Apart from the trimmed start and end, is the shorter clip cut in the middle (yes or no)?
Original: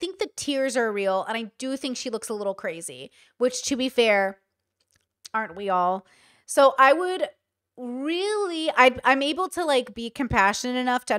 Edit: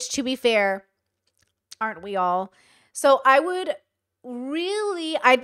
no